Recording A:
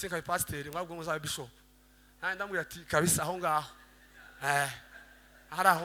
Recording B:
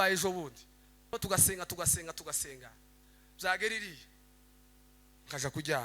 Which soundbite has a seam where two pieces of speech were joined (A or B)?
B